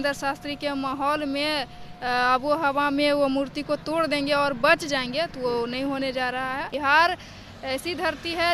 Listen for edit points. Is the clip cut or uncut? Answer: cut